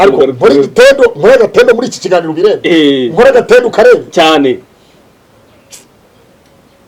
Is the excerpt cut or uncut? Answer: uncut